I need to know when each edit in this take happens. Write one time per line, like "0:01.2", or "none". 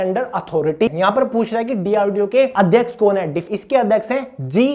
0:00.9
0:02.5
0:03.5